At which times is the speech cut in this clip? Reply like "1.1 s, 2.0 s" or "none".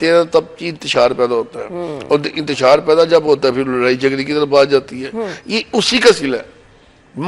none